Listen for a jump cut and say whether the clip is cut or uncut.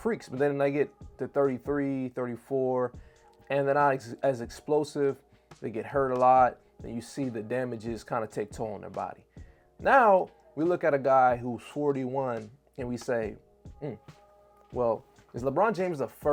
uncut